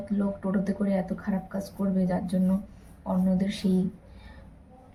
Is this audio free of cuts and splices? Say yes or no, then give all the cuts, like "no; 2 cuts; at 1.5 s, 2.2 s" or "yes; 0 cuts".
yes; 0 cuts